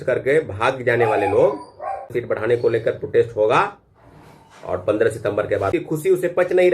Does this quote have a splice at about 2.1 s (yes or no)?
yes